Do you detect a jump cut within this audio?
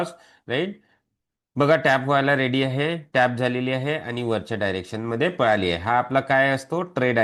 no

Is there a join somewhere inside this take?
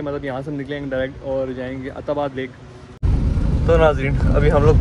yes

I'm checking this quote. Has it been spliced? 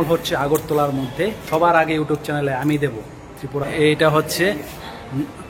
yes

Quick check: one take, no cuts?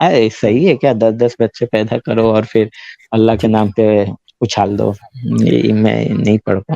no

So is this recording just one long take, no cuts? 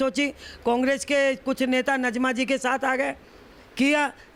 yes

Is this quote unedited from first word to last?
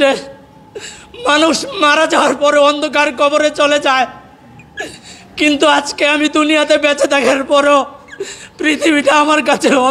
yes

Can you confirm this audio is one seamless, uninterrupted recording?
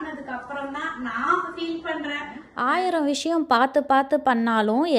no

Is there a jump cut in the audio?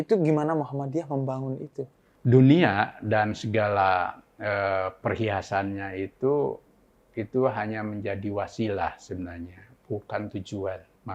yes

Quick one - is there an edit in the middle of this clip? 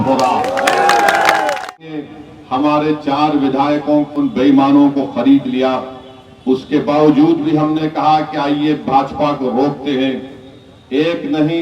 yes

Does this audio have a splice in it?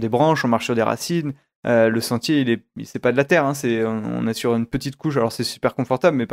no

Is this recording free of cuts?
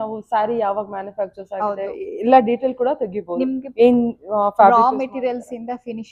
yes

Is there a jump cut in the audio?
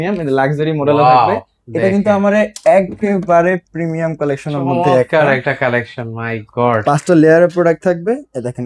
no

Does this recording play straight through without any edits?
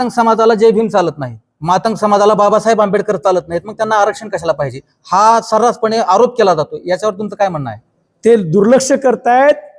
yes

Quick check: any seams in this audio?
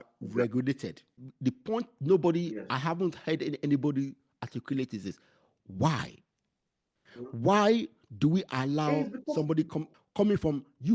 yes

